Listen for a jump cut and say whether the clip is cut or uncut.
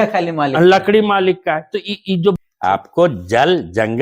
cut